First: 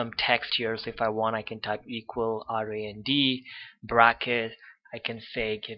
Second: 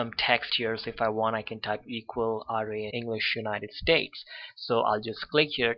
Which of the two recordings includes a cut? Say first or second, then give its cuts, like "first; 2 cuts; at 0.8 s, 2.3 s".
first; 1 cut; at 2.9 s